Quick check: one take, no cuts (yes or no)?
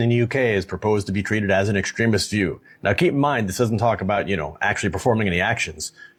yes